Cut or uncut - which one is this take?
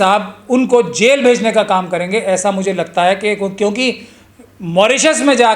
uncut